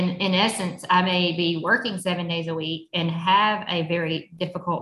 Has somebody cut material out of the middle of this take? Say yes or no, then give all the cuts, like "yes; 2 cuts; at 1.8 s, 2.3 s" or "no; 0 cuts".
no; 0 cuts